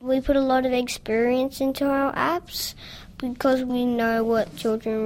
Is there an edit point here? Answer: yes; 1 cut; at 3.7 s

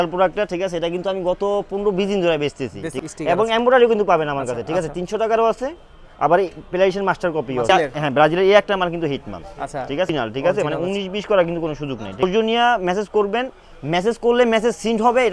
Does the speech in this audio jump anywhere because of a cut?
yes; 4 cuts; at 2.9 s, 7.7 s, 10.1 s, 12.2 s

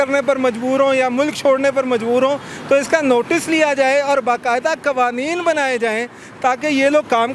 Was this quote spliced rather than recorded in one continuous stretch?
no; 0 cuts

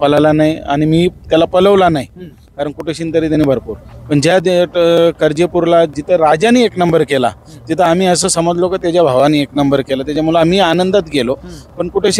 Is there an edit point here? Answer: no; 0 cuts

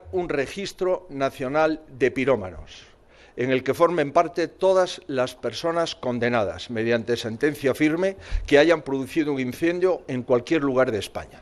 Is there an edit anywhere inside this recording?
no; 0 cuts

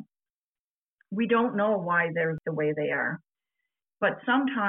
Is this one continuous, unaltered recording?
no; 1 cut; at 2.4 s

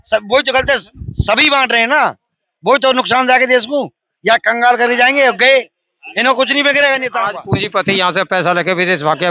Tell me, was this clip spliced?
yes; 1 cut; at 7.3 s

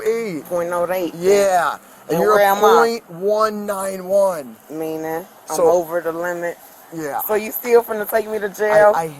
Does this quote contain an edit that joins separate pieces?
no; 0 cuts

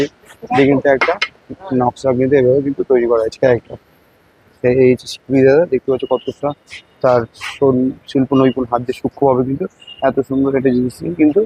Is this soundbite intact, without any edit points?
yes; 0 cuts

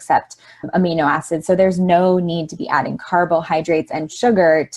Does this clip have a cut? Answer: no; 0 cuts

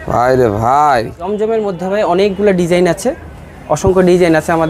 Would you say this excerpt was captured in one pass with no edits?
no; 1 cut; at 1.2 s

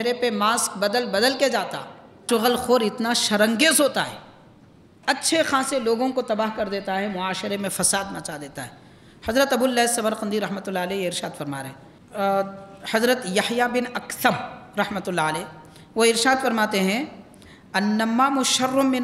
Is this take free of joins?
no; 2 cuts; at 2.2 s, 11.9 s

